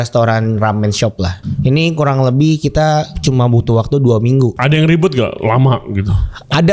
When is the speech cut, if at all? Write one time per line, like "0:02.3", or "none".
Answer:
0:01.4
0:04.6